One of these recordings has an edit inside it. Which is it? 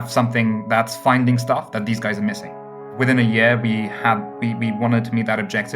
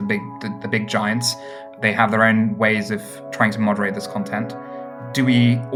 first; 1 cut; at 2.9 s

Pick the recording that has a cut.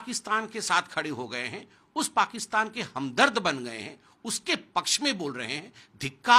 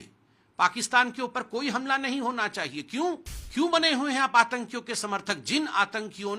second; 1 cut; at 3.3 s

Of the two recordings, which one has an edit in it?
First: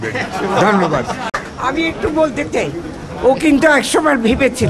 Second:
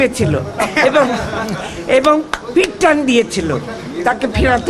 first; 1 cut; at 1.3 s

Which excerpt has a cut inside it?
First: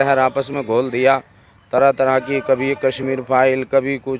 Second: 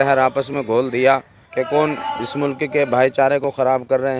second; 1 cut; at 1.4 s

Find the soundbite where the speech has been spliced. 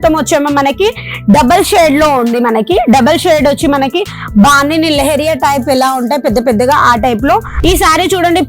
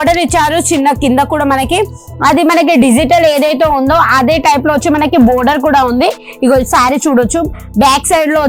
first; 1 cut; at 7.5 s

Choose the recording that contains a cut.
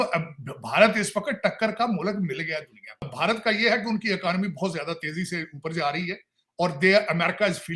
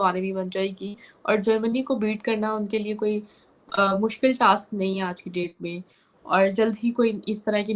first; 1 cut; at 3.0 s

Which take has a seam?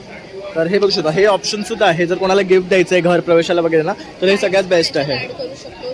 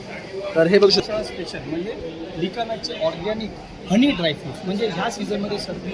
second; 1 cut; at 1.0 s

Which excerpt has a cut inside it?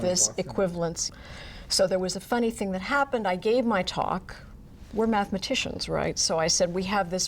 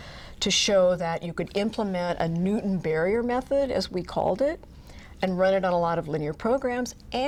first; 1 cut; at 1.0 s

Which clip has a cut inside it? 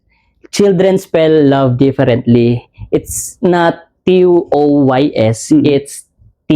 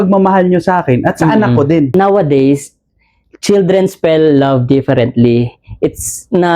second; 1 cut; at 1.9 s

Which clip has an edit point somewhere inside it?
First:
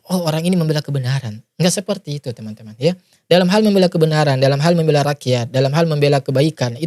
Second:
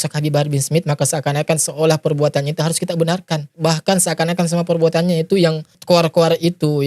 second; 2 cuts; at 3.5 s, 5.7 s

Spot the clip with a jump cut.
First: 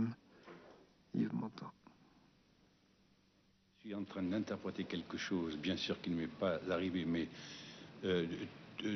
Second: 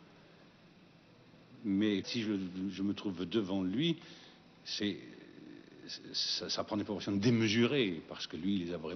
second; 1 cut; at 2.7 s

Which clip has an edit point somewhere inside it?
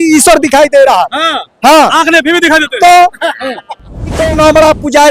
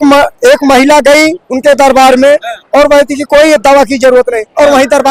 first; 1 cut; at 4.2 s

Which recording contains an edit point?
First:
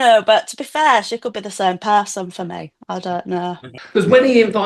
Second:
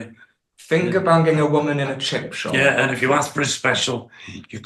first; 1 cut; at 3.7 s

